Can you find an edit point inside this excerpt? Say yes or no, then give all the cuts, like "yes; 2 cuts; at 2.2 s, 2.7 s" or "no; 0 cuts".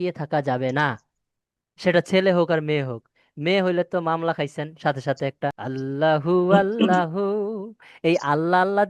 yes; 1 cut; at 5.6 s